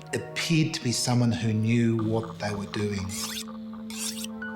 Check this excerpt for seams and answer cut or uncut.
uncut